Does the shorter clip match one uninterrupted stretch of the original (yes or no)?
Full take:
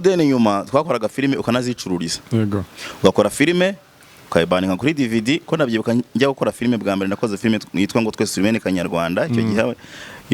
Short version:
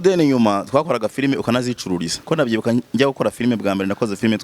no